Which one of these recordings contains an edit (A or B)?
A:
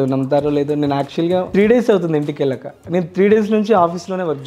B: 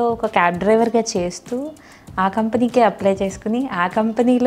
A